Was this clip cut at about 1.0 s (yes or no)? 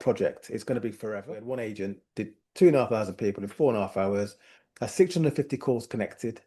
yes